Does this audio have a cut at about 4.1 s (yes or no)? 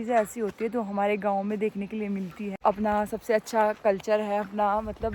no